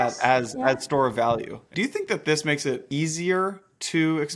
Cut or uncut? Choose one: cut